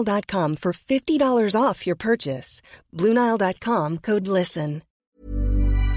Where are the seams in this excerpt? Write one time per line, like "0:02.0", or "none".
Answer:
0:04.9